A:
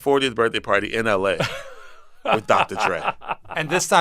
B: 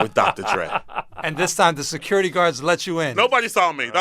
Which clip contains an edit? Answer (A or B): B